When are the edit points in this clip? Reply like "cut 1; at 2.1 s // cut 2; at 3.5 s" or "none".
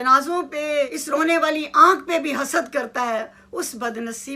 cut 1; at 1.0 s